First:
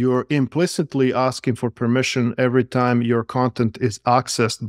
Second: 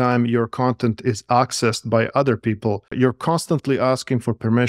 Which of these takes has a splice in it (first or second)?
second